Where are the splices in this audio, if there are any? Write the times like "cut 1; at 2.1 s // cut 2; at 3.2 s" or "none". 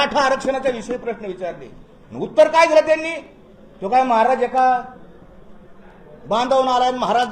none